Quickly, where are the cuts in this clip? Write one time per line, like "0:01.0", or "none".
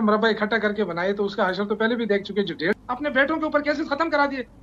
0:02.8